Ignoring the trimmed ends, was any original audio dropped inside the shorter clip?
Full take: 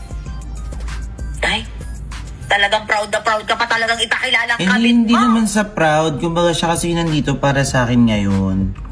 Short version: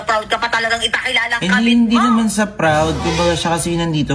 no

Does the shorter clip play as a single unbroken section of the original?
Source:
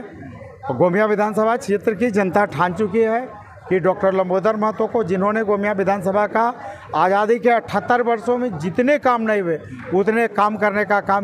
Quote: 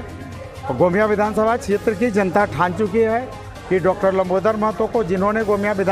yes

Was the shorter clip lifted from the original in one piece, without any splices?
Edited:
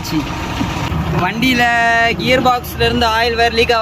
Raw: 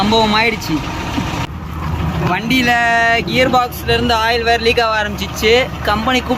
no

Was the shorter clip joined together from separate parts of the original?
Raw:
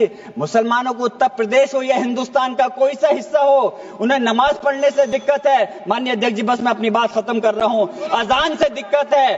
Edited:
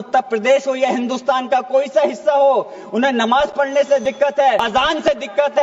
yes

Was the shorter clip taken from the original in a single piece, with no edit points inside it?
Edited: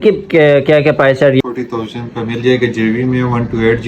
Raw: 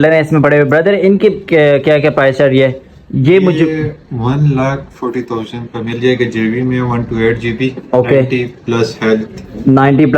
no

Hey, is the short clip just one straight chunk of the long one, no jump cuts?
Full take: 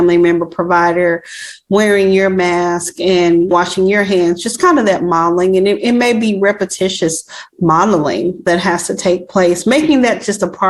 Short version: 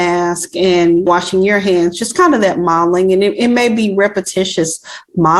yes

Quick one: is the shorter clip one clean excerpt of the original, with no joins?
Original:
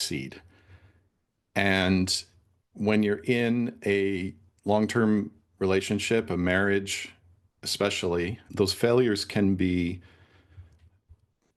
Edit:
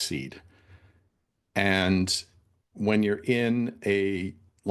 yes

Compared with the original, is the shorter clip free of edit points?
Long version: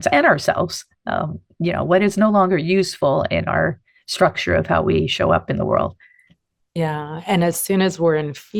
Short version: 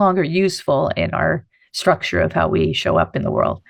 yes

